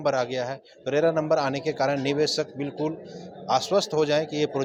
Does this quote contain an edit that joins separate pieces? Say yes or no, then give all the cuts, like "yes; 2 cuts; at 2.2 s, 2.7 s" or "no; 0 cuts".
no; 0 cuts